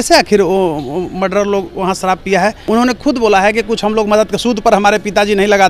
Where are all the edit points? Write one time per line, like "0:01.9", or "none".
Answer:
0:02.6